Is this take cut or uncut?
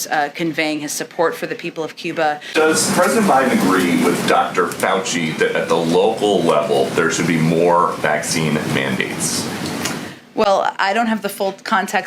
cut